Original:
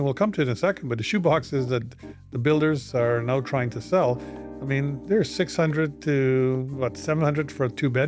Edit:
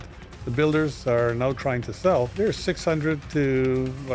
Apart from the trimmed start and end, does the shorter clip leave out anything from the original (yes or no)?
yes